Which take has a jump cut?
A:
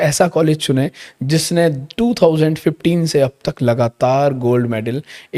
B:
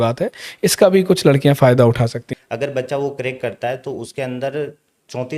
B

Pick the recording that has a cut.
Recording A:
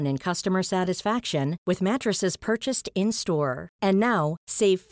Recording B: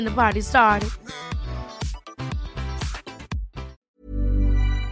B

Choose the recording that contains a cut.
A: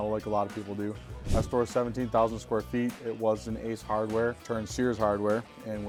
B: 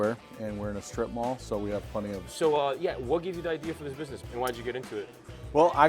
B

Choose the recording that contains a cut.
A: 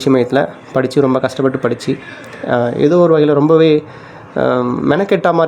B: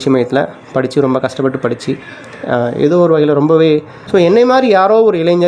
B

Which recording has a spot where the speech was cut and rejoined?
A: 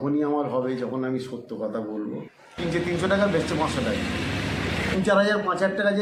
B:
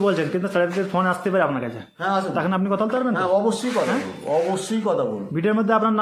A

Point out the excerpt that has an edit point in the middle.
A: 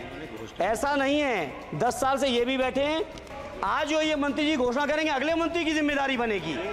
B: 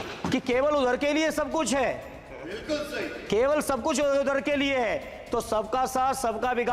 A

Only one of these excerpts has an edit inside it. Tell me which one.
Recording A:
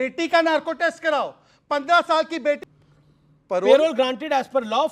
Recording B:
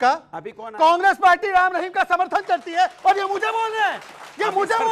A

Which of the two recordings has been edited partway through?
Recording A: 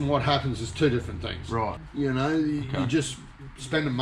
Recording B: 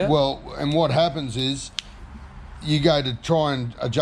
A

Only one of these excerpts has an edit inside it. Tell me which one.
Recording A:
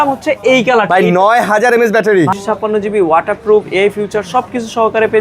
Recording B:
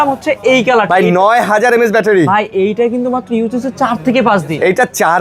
A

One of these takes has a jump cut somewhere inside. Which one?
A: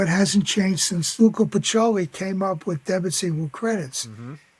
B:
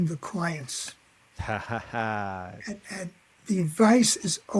A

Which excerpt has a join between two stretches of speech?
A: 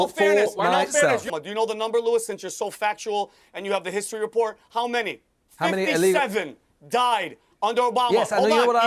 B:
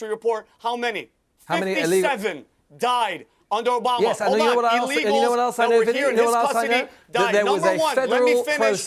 A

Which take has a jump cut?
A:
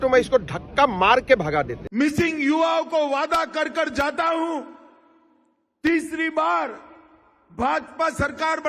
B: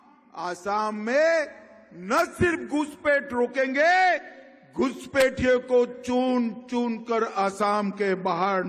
A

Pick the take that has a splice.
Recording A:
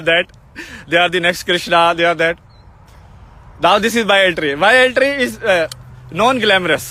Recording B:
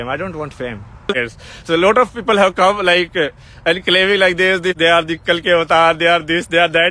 B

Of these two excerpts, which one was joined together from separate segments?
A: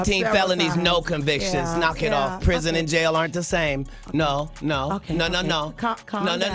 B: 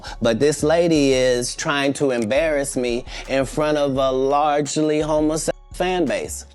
B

